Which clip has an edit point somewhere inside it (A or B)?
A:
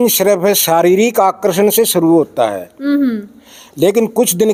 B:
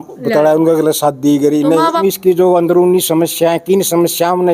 B